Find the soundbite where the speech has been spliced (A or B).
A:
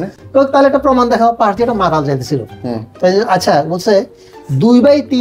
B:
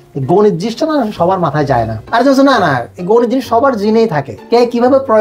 B